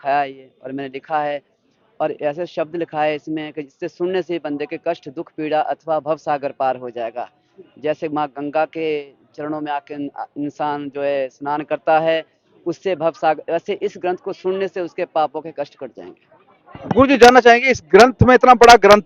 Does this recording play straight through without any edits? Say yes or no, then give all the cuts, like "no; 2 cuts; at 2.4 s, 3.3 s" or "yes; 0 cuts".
yes; 0 cuts